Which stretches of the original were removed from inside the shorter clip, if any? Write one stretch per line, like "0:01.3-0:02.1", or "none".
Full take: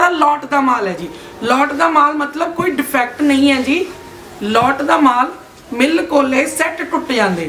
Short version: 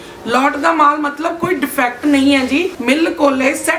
0:03.9-0:05.7